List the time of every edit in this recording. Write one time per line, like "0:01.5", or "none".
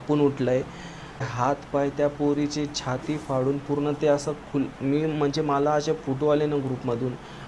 0:01.3